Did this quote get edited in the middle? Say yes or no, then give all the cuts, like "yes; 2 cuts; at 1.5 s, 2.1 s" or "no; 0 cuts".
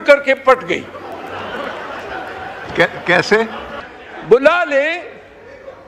no; 0 cuts